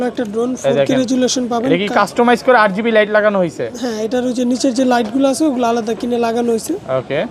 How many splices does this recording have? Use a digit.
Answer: 0